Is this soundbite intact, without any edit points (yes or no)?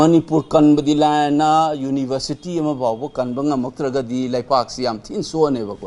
yes